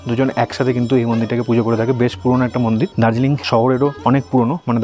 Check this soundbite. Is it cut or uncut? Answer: uncut